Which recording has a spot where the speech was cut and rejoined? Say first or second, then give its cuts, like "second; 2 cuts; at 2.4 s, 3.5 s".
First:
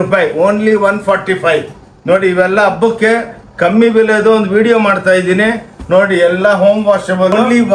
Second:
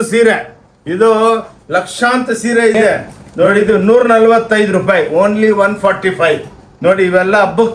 second; 1 cut; at 3.5 s